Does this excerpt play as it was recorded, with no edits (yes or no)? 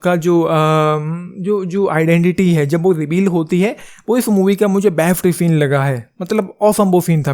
yes